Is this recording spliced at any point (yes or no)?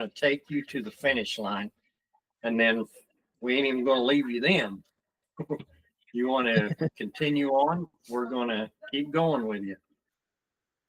no